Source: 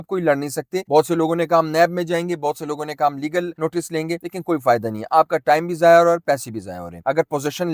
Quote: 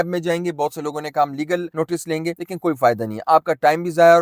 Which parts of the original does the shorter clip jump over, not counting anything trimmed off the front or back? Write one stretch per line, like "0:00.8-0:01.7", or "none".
none

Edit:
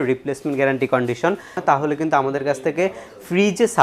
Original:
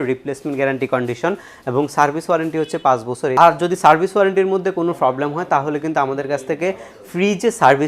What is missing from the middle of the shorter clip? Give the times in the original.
0:01.5-0:05.4

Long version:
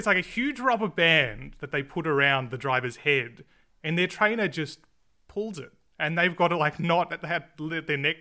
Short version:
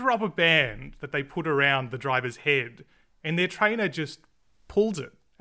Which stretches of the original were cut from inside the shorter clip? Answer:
none

